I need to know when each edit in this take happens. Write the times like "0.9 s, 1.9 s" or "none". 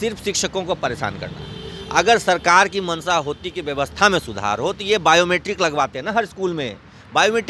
none